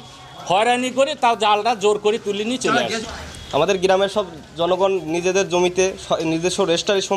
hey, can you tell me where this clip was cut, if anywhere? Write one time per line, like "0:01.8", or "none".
0:03.0